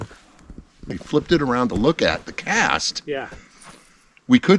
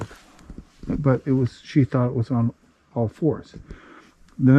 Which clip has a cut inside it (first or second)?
first